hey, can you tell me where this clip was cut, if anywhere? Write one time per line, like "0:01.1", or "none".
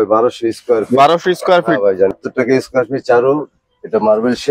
0:02.1